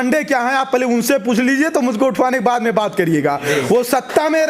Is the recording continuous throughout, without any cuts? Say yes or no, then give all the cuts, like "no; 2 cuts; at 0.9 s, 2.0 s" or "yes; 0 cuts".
yes; 0 cuts